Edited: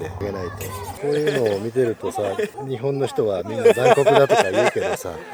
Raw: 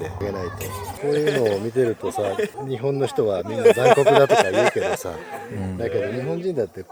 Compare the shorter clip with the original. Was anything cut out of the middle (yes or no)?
no